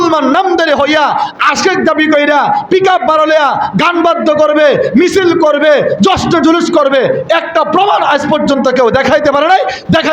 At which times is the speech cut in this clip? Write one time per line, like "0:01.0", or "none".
none